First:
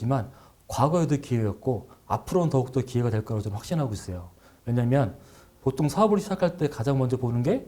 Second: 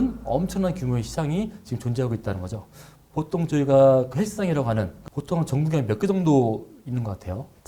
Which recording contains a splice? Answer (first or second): second